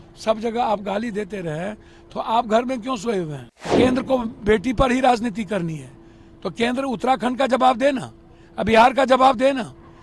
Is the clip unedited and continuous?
no; 1 cut; at 3.7 s

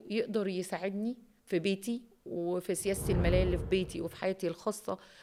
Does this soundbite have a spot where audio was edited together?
no; 0 cuts

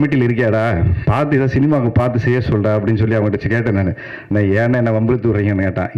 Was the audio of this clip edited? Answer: no; 0 cuts

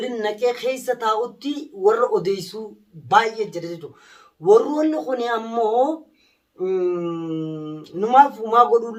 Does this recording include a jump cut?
no; 0 cuts

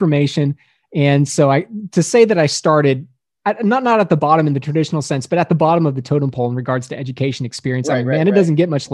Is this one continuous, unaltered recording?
yes; 0 cuts

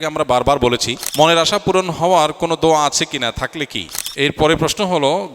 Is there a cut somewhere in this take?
yes; 2 cuts; at 1.1 s, 4.0 s

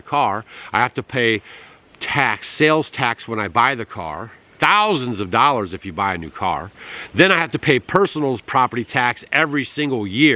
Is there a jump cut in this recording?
no; 0 cuts

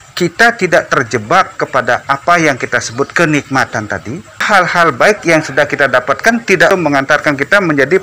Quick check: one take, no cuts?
no; 2 cuts; at 4.4 s, 6.7 s

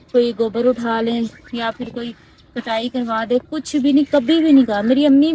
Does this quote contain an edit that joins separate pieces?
no; 0 cuts

